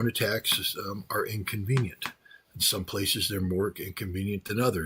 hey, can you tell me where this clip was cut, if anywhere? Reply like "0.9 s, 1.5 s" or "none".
none